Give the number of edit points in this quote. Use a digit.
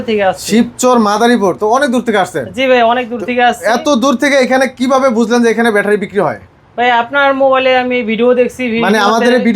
0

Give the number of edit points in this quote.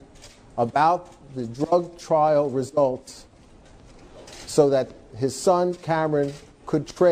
0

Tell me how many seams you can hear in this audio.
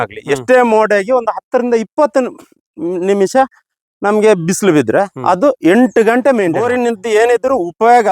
1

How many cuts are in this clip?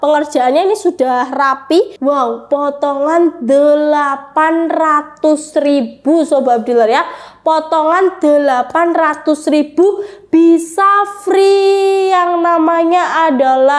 1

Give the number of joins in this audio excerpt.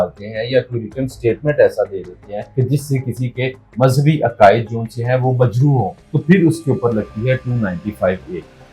2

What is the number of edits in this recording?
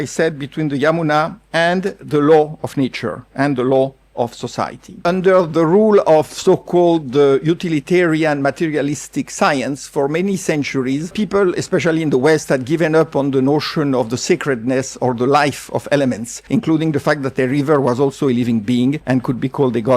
4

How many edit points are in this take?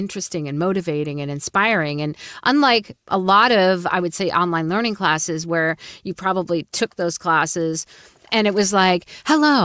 0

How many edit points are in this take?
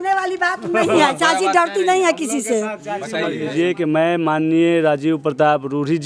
1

